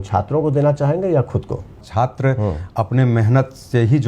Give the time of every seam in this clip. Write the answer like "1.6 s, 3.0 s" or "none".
1.8 s